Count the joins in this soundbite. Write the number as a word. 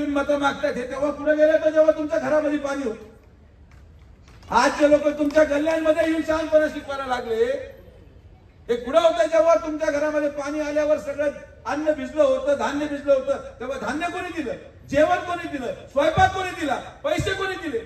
zero